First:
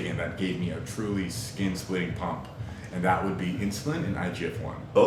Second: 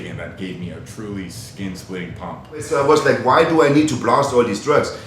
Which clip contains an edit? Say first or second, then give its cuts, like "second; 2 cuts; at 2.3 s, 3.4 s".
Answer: second; 1 cut; at 2.7 s